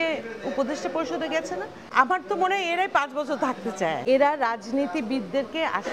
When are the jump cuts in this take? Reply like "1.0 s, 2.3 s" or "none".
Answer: 1.8 s, 4.0 s